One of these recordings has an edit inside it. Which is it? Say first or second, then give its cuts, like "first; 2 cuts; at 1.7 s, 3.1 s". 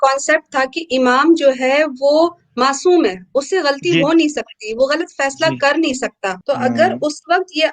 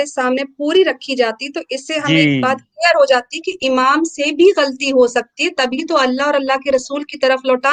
first; 1 cut; at 6.3 s